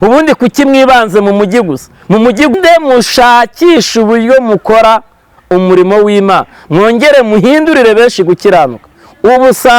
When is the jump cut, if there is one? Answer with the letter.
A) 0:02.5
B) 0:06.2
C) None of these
A